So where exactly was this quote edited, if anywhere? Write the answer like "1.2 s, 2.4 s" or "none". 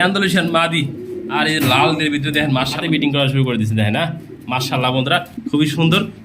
2.8 s